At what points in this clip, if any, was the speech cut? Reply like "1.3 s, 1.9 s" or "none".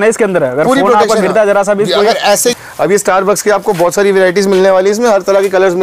2.5 s